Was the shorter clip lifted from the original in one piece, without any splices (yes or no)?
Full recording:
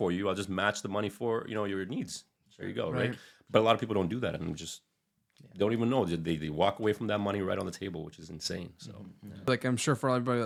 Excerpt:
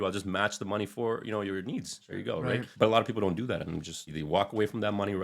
no